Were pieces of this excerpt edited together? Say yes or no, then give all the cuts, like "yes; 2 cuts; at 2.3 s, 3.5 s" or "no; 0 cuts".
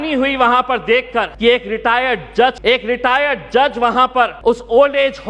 yes; 3 cuts; at 1.3 s, 2.6 s, 4.3 s